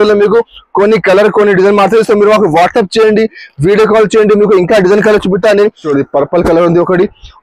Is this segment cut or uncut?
cut